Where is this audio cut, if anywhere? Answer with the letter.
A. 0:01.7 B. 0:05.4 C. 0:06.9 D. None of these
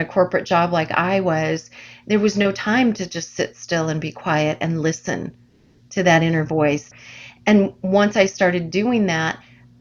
C